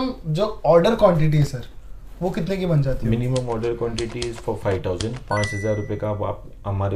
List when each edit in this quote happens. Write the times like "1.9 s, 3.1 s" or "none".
none